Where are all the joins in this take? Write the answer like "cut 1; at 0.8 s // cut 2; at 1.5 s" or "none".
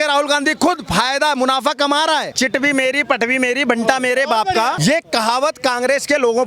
cut 1; at 2.3 s // cut 2; at 4.8 s